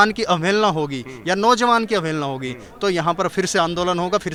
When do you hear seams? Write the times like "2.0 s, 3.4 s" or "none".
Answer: none